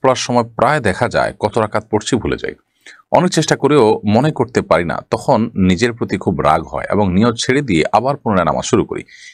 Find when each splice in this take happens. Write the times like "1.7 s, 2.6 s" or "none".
none